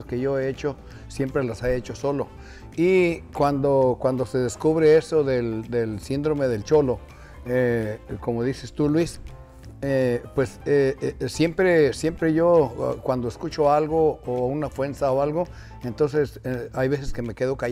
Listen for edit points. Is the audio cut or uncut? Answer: uncut